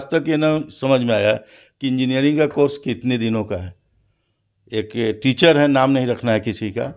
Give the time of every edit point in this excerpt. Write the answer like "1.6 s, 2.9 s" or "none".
none